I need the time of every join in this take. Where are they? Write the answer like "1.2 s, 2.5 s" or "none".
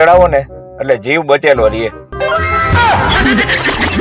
none